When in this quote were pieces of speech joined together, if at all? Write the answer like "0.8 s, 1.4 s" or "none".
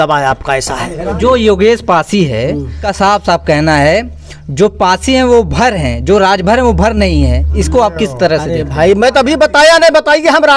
1.1 s, 2.8 s

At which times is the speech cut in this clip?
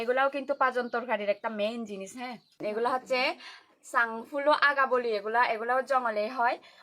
2.4 s

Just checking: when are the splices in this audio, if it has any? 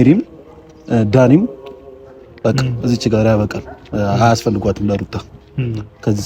none

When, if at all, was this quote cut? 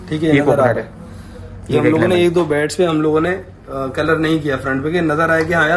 none

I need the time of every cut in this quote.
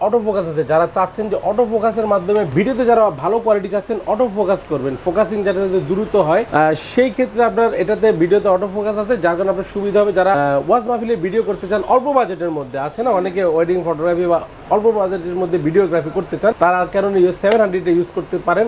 none

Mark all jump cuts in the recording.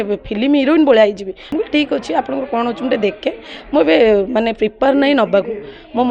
1.5 s

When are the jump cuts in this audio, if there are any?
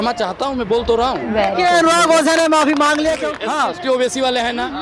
3.3 s

